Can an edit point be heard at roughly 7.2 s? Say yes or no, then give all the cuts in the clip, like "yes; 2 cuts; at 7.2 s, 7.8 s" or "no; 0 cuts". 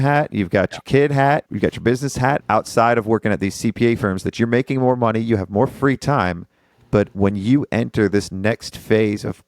no; 1 cut; at 2.4 s